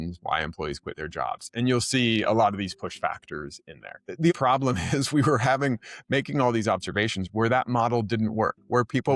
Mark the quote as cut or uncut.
cut